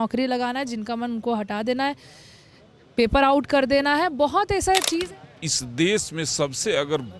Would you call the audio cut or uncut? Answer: cut